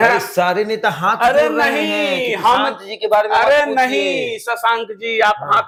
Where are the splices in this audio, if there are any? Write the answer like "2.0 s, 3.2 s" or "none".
none

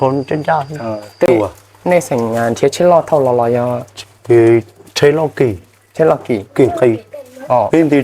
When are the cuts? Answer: 1.3 s

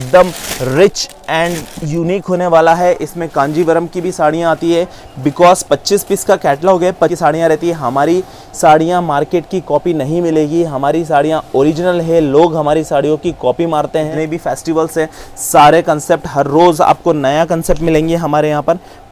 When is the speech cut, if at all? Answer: 7.2 s, 14.1 s

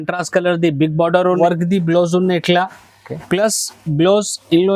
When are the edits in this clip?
1.4 s

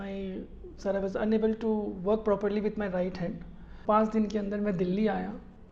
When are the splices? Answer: 3.8 s

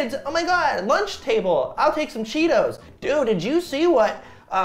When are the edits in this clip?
none

